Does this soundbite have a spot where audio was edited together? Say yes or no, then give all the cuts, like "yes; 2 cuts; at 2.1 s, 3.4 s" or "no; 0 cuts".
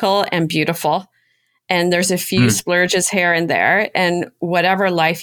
no; 0 cuts